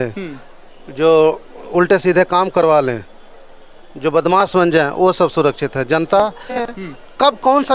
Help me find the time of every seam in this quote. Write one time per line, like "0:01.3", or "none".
0:06.8